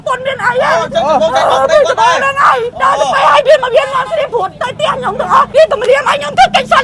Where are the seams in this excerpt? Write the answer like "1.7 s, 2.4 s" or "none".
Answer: 2.7 s, 5.5 s